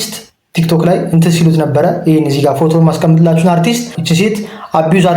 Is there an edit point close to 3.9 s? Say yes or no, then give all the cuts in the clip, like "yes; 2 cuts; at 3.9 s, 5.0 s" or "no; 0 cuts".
yes; 1 cut; at 3.9 s